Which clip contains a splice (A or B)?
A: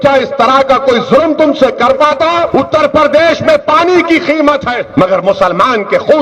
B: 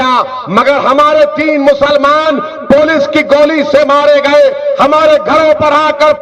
A